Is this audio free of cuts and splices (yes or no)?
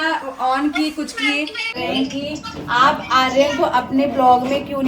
no